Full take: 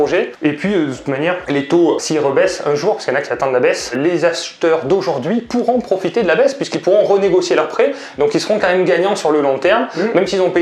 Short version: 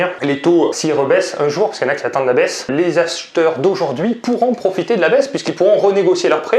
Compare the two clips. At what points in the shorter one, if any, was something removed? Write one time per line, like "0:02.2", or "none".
none